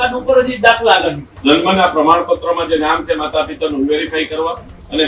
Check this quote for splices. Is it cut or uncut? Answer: cut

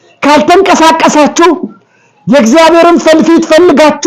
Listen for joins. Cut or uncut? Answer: uncut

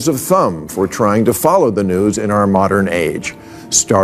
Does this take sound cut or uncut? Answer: uncut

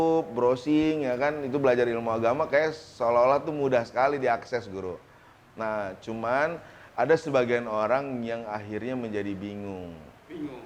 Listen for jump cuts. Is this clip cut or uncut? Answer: uncut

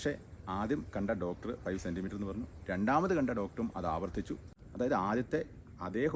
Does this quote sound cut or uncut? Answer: cut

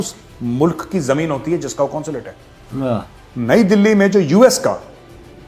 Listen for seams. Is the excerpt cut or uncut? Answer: uncut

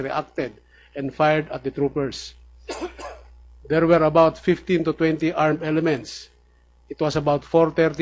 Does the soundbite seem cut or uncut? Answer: uncut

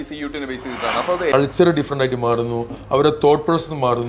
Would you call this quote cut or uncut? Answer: cut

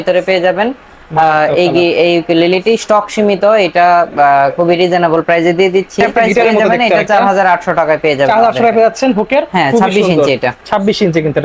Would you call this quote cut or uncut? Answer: cut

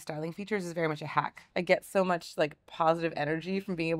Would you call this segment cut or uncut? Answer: cut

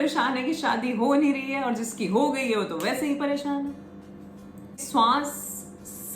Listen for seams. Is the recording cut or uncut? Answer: cut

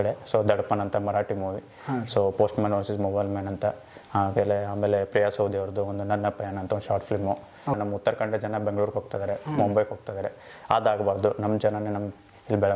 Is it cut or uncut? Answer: cut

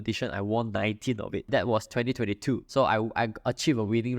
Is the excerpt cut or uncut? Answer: cut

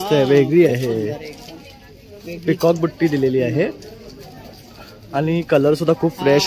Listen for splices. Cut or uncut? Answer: uncut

